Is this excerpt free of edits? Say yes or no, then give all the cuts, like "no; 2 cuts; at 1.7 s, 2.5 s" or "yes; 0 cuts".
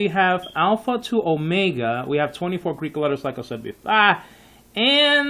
yes; 0 cuts